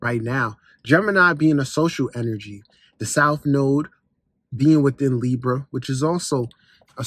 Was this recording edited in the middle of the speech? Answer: no; 0 cuts

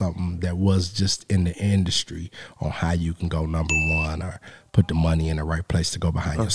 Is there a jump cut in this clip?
no; 0 cuts

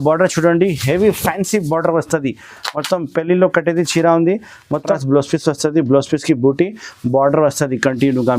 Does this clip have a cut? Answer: yes; 1 cut; at 4.9 s

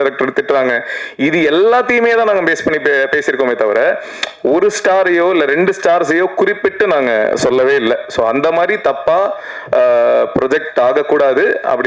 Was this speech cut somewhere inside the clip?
no; 0 cuts

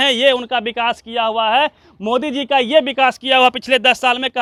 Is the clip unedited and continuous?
yes; 0 cuts

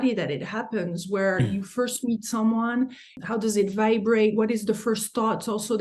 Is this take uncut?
no; 1 cut; at 3.1 s

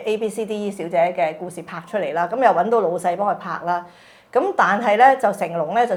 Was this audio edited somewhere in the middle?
no; 0 cuts

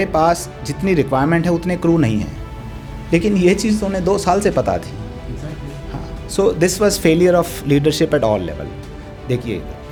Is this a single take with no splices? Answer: yes; 0 cuts

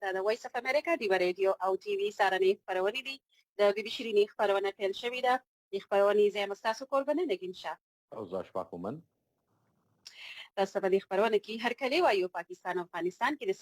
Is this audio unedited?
yes; 0 cuts

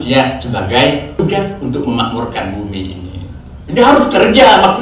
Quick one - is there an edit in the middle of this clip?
yes; 1 cut; at 1.2 s

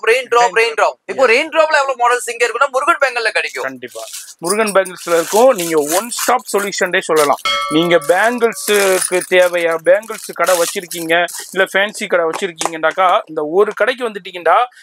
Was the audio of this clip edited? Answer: no; 0 cuts

